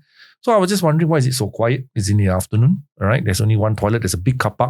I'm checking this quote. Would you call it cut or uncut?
uncut